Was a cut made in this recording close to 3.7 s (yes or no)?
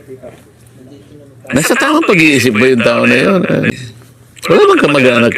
yes